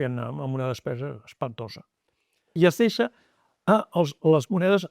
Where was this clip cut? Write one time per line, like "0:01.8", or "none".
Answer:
0:02.5